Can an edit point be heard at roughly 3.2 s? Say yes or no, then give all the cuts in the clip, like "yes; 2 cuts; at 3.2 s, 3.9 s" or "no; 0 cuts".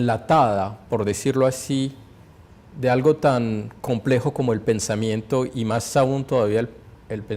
yes; 1 cut; at 3.2 s